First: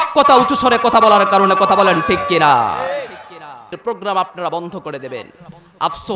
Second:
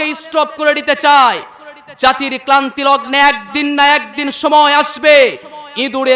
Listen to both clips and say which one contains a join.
first; 1 cut; at 3.7 s

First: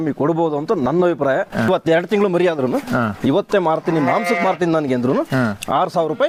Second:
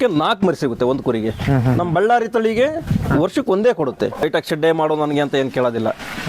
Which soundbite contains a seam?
second; 1 cut; at 4.2 s

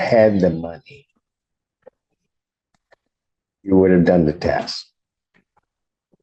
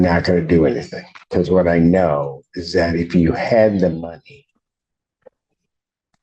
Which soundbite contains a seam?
second; 1 cut; at 2.1 s

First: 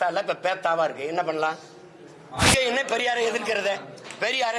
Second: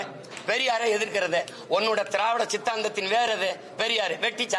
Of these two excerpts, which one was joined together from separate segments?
first; 1 cut; at 2.5 s

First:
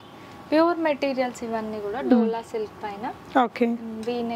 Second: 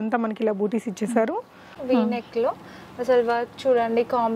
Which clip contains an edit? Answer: second; 1 cut; at 1.7 s

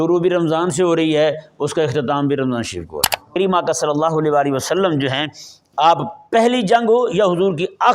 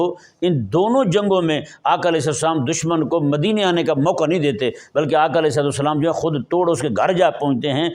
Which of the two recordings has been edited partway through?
first; 1 cut; at 3.3 s

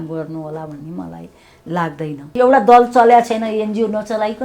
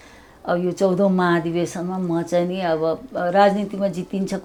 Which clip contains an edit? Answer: first; 1 cut; at 2.3 s

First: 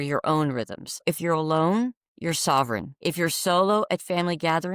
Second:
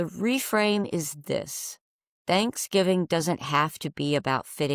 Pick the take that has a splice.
first; 2 cuts; at 1.0 s, 2.9 s

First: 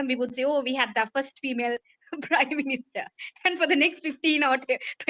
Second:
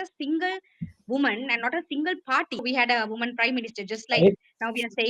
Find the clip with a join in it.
second; 1 cut; at 2.6 s

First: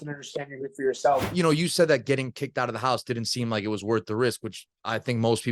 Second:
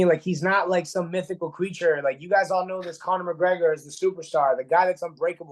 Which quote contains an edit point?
first; 1 cut; at 1.3 s

